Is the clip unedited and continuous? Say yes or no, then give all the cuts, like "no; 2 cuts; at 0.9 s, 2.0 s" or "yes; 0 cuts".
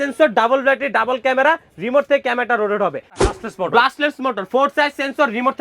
no; 1 cut; at 3.3 s